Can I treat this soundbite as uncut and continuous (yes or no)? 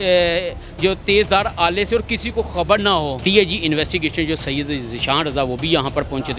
no